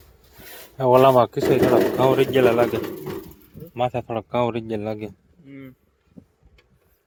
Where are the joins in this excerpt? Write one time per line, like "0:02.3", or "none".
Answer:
none